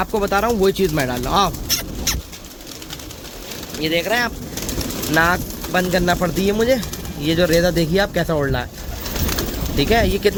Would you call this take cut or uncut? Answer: uncut